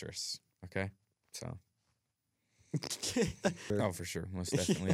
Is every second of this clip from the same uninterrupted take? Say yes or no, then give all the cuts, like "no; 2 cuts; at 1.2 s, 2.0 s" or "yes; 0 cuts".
no; 1 cut; at 3.7 s